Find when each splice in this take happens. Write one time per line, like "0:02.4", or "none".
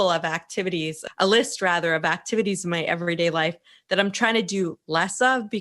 0:01.0